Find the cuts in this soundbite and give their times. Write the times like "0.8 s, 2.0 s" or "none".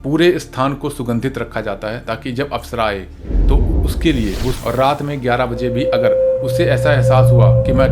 4.6 s